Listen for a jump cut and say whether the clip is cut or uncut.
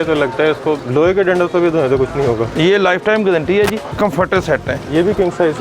cut